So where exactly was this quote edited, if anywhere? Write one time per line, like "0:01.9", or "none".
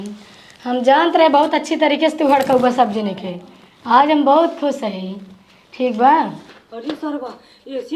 0:06.9